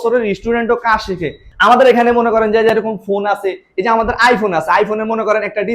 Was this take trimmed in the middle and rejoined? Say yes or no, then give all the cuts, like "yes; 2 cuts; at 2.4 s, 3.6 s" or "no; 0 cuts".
yes; 1 cut; at 1.4 s